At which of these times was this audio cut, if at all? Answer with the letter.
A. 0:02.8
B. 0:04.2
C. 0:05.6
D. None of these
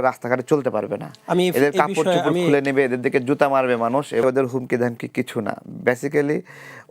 B